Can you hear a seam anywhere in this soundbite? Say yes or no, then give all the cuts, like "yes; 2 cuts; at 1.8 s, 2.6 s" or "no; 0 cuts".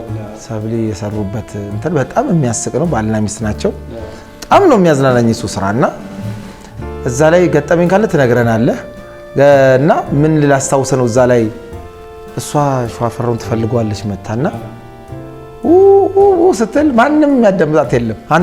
no; 0 cuts